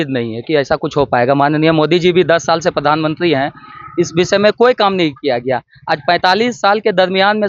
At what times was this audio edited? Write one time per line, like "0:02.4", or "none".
none